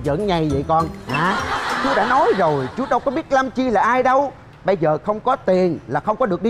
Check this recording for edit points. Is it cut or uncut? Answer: uncut